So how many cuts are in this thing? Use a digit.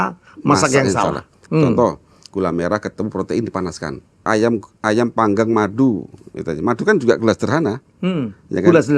2